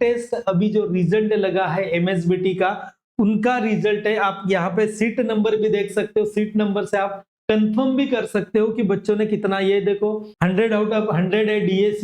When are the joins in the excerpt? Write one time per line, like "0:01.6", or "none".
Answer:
0:10.4